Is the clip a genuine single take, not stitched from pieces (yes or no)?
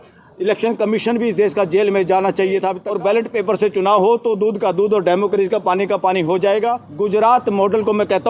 no